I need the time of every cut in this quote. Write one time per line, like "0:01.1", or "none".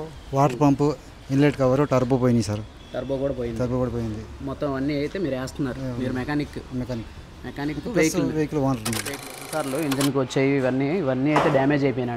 0:09.6